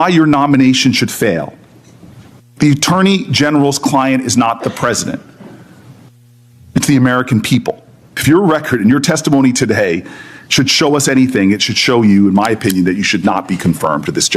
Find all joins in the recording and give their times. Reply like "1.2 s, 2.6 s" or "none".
8.2 s